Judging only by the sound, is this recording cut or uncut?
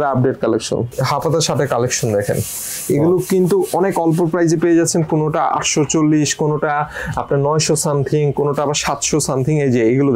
cut